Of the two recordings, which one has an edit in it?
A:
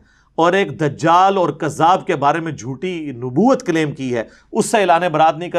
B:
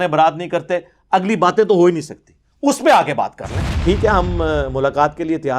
B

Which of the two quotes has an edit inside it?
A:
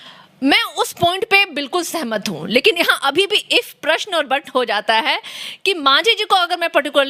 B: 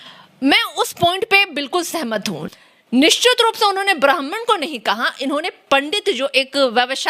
B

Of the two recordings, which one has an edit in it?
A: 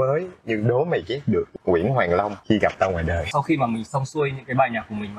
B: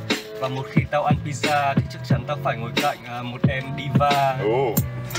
A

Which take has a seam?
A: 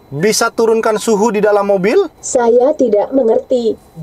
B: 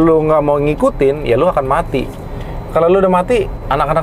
A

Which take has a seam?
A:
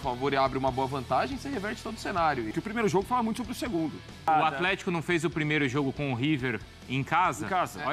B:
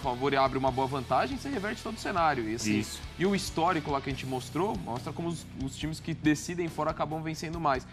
A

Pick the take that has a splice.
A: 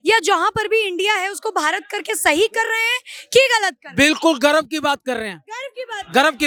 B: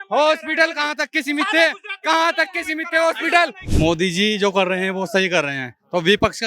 B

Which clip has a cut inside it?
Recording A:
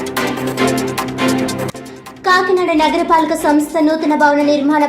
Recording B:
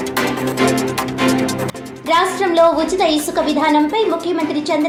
A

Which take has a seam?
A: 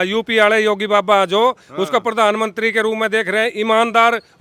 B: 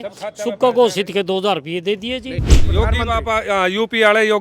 B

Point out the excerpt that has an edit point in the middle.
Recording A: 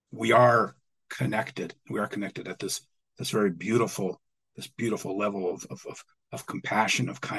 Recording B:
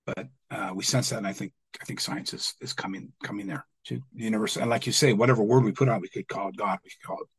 B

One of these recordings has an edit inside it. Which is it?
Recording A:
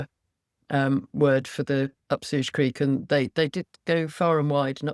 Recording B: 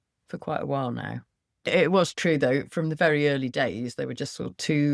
B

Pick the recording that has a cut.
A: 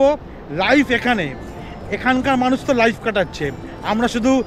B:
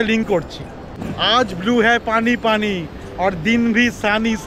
B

